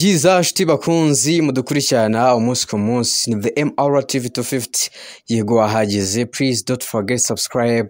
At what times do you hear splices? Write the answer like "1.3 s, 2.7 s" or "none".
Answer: none